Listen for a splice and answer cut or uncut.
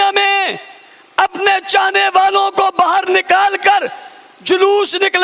uncut